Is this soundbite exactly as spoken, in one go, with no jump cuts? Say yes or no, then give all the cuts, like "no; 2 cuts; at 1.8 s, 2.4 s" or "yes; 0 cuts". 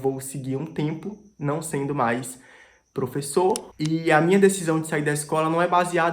no; 1 cut; at 3.7 s